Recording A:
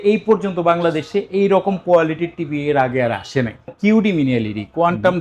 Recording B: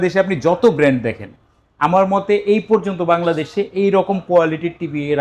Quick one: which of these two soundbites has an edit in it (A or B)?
A